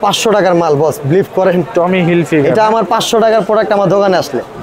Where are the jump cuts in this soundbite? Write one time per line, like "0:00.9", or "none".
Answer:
none